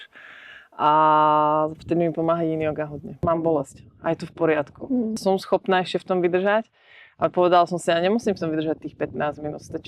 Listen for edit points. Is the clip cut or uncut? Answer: cut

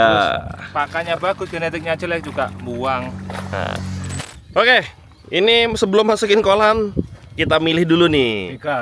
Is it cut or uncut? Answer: cut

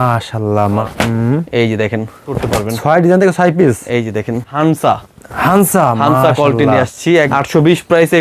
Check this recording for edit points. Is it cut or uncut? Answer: cut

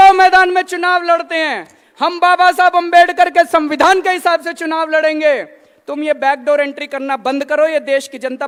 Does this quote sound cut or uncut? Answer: uncut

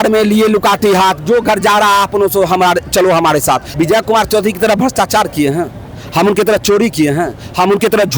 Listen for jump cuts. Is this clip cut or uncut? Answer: cut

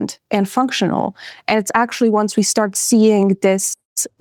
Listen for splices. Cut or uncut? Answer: uncut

